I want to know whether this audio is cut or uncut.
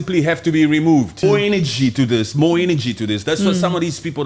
cut